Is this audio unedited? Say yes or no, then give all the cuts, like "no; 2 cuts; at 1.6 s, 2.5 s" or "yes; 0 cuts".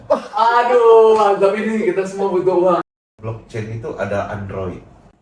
no; 1 cut; at 2.8 s